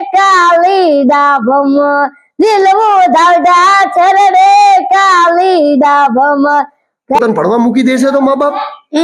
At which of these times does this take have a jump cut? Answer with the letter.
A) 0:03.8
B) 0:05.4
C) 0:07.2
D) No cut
C